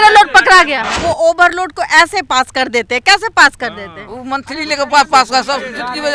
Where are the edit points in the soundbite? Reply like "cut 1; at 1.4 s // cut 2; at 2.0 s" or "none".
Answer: cut 1; at 1.0 s